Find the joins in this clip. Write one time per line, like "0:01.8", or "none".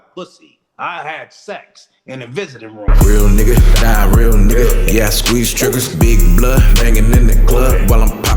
0:02.9